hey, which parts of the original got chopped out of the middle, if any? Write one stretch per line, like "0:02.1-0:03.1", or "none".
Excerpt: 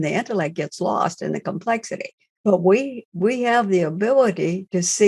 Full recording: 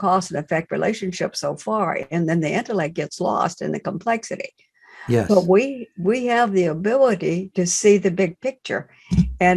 0:04.8-0:05.3